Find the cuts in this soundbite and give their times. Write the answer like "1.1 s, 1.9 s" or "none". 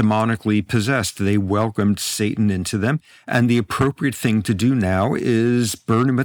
none